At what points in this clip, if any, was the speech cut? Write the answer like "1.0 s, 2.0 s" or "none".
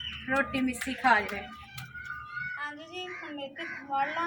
2.4 s